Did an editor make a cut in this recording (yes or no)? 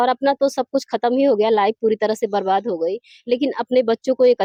no